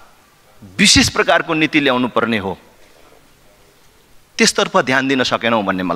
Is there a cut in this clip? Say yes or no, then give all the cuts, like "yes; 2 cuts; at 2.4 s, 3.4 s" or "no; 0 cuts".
no; 0 cuts